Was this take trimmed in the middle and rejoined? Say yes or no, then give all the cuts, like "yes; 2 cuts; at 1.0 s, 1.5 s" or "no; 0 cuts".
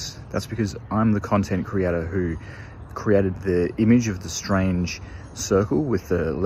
no; 0 cuts